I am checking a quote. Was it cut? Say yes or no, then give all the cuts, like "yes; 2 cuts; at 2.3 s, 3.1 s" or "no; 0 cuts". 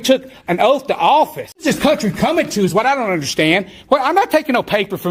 no; 0 cuts